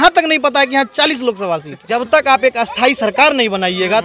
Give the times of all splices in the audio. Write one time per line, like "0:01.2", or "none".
0:01.8